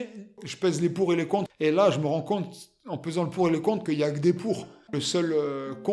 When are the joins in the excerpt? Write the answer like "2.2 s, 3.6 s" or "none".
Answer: 1.5 s, 4.7 s